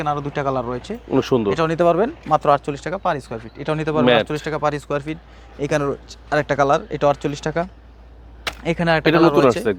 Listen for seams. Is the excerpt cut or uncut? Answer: uncut